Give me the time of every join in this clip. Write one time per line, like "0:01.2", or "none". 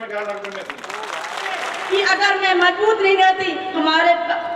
0:01.7

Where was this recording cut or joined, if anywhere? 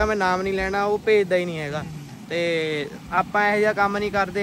none

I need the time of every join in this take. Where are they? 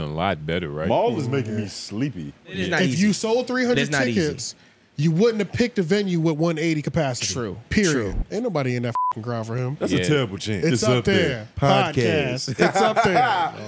0:02.6
0:08.3
0:10.6

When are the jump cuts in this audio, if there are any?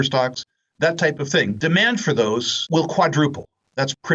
0:01.6
0:02.5

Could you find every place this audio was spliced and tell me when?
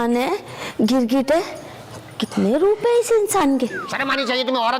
0:03.8

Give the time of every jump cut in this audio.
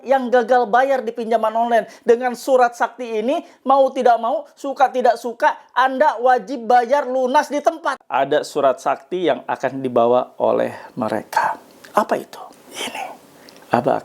0:08.0
0:12.6

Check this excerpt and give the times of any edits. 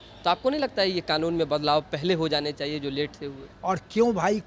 0:03.5

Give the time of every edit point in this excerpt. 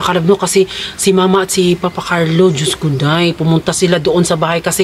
none

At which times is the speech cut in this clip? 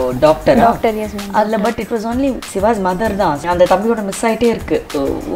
0:02.5
0:03.4

